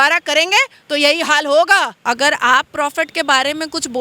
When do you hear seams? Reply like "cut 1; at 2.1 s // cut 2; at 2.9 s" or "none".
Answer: cut 1; at 2.0 s